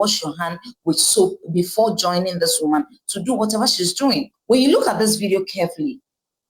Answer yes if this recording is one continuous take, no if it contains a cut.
no